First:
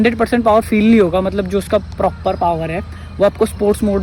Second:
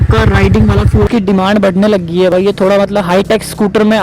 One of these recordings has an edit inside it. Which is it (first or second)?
second